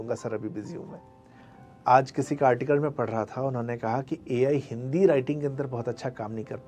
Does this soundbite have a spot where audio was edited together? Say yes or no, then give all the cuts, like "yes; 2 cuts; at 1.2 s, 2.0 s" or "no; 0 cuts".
yes; 1 cut; at 1.4 s